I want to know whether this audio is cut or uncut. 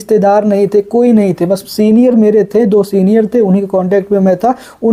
uncut